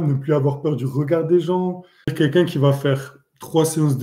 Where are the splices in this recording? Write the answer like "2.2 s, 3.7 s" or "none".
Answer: 2.1 s

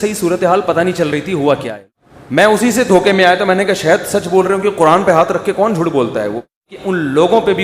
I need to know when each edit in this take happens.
1.7 s, 6.5 s

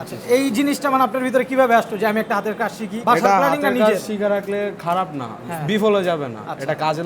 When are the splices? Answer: 2.9 s

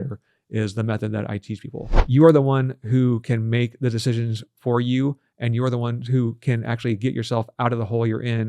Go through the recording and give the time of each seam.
1.8 s

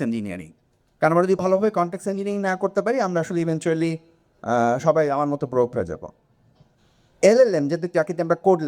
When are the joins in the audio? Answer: none

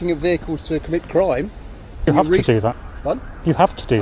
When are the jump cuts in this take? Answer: 2.1 s

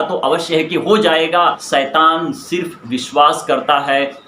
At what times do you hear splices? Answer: 1.6 s

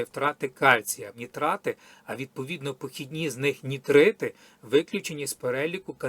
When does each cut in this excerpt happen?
1.2 s

